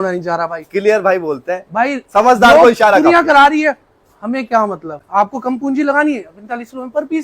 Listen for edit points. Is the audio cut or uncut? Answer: cut